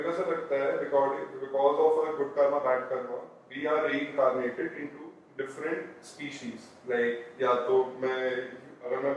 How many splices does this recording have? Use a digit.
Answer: 0